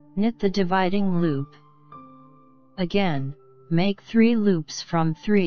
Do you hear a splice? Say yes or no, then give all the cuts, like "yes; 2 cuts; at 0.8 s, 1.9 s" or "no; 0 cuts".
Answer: no; 0 cuts